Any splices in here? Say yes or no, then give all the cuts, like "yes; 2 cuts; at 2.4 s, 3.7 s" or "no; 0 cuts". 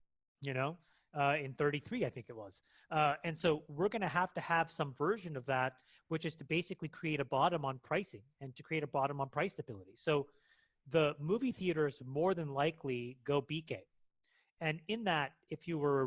no; 0 cuts